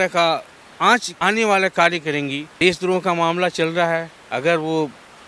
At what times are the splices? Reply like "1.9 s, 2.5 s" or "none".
1.1 s, 2.4 s